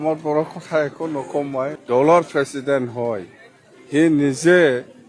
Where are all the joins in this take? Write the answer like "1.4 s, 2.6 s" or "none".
1.8 s